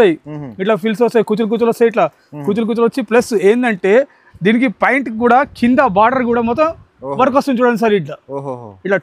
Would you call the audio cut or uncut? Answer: uncut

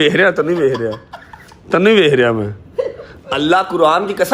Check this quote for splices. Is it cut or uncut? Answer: uncut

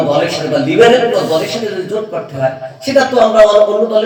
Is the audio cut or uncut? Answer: uncut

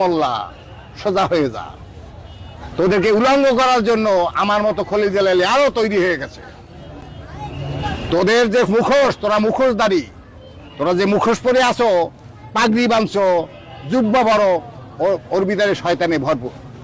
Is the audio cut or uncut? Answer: uncut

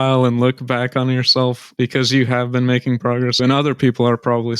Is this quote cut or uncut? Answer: cut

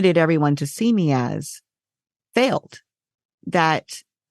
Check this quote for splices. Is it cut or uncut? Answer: cut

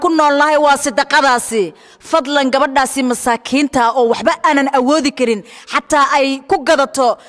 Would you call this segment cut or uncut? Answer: uncut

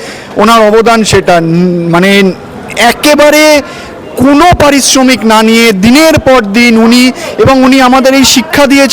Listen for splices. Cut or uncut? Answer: uncut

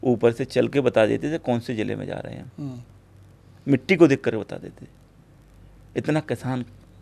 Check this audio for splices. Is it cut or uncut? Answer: uncut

